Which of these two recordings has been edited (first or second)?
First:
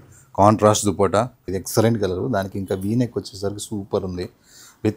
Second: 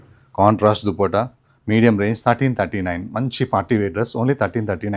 first